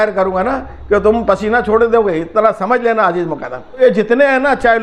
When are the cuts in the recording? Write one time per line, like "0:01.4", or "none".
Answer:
0:03.8